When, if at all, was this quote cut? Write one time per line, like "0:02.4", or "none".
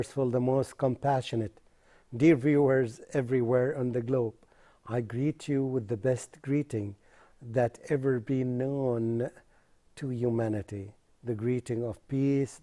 none